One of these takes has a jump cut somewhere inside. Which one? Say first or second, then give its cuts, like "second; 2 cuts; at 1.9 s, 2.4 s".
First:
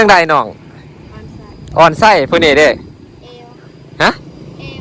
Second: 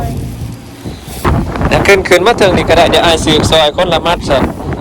second; 1 cut; at 1.3 s